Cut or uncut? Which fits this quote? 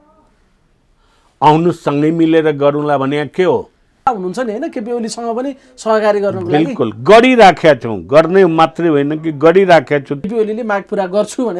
cut